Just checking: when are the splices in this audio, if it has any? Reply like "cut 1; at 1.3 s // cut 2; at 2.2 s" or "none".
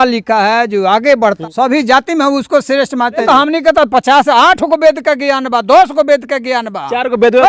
cut 1; at 1.4 s // cut 2; at 3.2 s